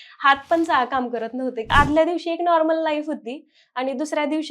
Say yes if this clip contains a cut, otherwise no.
yes